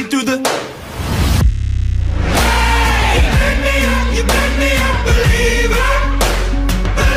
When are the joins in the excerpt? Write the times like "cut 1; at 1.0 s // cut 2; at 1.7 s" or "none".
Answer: none